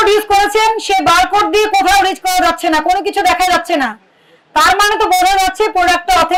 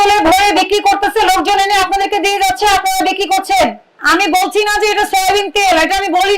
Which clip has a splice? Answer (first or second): second